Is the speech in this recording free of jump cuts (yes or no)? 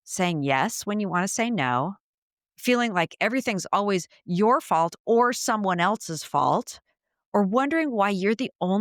yes